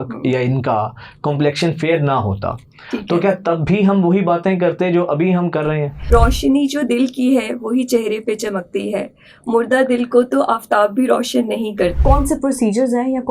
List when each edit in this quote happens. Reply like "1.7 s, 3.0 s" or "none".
6.1 s, 12.0 s